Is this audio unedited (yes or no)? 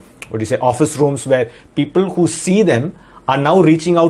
yes